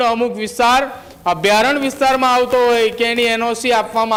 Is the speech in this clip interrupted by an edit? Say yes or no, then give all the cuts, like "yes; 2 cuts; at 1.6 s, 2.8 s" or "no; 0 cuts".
no; 0 cuts